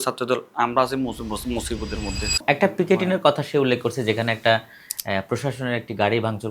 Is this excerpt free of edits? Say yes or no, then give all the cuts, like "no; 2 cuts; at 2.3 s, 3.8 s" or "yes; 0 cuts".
no; 1 cut; at 2.4 s